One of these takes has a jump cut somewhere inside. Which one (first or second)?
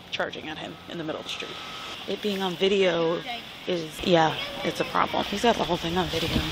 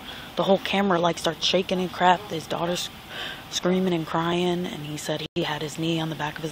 first